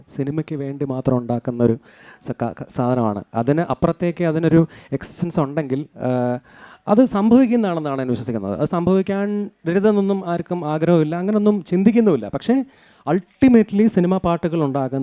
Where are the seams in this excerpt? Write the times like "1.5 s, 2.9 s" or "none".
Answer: none